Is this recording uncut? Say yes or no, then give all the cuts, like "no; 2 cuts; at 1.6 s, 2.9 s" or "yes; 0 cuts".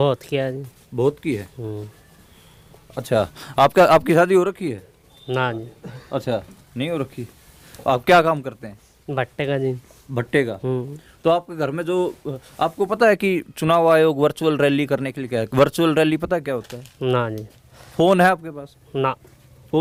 yes; 0 cuts